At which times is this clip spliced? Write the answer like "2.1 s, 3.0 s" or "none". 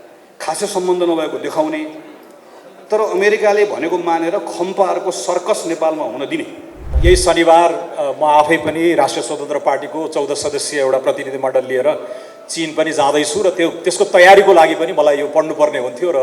6.9 s

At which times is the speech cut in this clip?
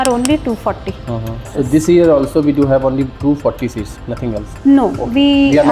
1.5 s

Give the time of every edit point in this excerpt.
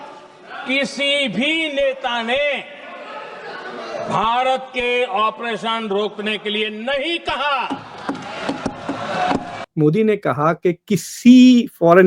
9.5 s

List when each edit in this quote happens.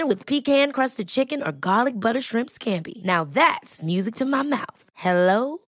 none

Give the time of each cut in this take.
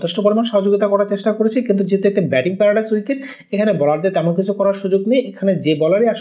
none

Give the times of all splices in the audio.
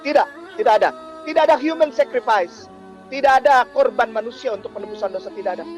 1.1 s

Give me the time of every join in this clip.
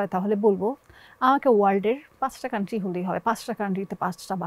2.1 s

